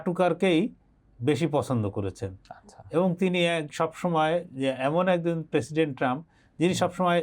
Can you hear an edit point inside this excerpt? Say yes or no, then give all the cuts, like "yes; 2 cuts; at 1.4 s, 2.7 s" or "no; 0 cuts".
no; 0 cuts